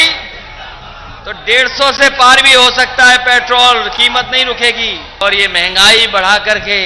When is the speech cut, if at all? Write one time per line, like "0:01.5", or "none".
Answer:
0:05.2